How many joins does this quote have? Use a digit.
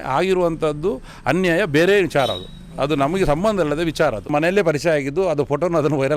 1